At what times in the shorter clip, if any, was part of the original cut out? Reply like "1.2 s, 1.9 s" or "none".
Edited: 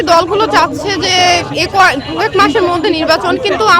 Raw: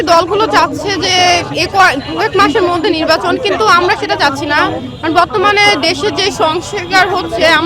none